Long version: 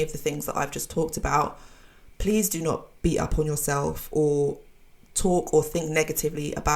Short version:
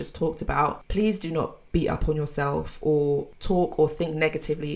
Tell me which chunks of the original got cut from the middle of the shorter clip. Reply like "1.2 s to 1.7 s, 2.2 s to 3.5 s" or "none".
1.6 s to 2.1 s, 4.6 s to 5.1 s